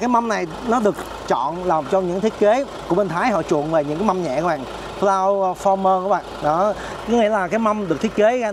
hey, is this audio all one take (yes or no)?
yes